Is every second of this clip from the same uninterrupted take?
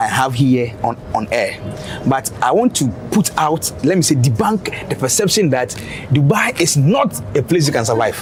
yes; 0 cuts

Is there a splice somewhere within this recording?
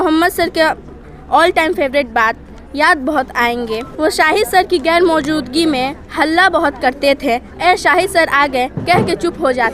yes; 1 cut; at 3.9 s

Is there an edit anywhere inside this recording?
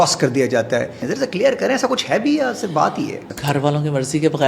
yes; 2 cuts; at 1.0 s, 3.3 s

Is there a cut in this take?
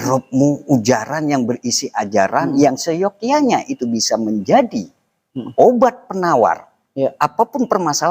no; 0 cuts

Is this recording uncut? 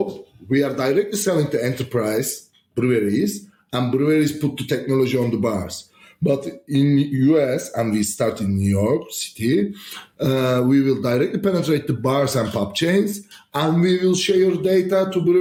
yes; 0 cuts

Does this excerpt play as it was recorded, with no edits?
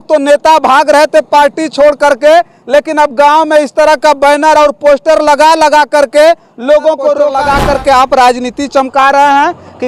no; 1 cut; at 7.3 s

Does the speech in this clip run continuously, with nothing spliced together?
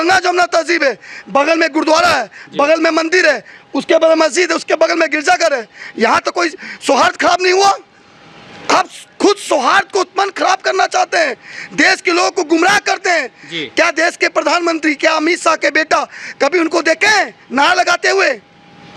yes; 0 cuts

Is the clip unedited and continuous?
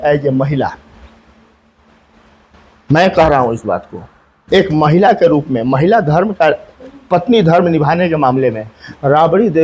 yes; 0 cuts

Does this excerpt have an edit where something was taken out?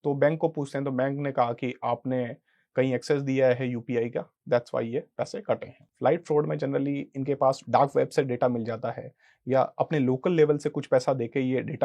yes; 1 cut; at 5.8 s

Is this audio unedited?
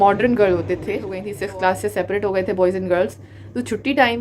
no; 1 cut; at 1.3 s

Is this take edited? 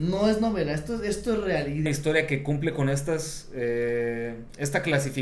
yes; 1 cut; at 1.9 s

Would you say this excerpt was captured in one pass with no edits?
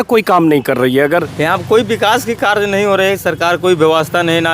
no; 1 cut; at 1.3 s

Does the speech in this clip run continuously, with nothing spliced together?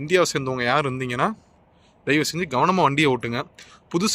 yes; 0 cuts

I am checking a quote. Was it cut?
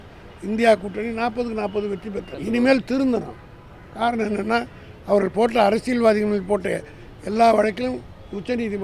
yes; 1 cut; at 2.3 s

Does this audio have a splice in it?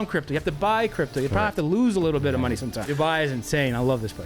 yes; 1 cut; at 2.9 s

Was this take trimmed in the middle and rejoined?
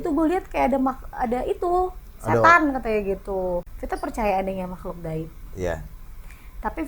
yes; 1 cut; at 3.7 s

